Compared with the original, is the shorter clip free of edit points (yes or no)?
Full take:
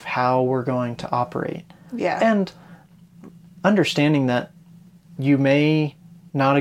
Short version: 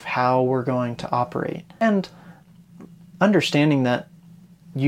no